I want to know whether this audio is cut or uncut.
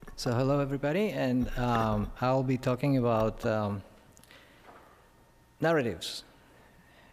cut